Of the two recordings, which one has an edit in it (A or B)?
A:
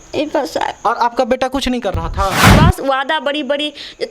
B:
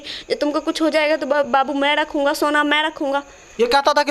A